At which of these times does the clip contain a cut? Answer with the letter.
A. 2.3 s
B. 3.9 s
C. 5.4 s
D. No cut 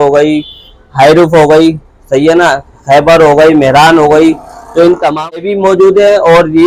C